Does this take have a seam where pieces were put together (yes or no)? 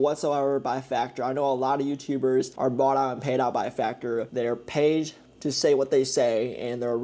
yes